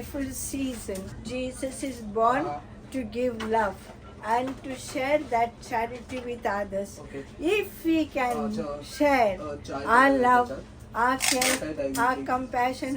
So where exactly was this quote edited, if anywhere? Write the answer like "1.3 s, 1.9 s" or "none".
1.1 s